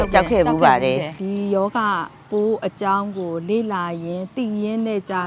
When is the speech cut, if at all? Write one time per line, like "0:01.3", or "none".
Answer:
0:01.1